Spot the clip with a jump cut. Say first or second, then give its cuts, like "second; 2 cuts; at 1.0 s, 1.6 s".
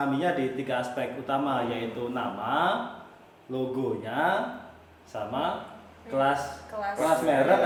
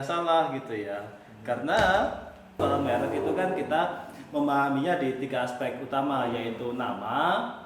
second; 1 cut; at 2.6 s